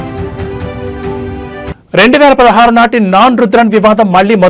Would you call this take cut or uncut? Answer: cut